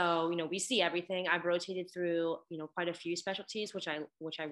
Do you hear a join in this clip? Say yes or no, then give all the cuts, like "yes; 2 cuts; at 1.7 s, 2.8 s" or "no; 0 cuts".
no; 0 cuts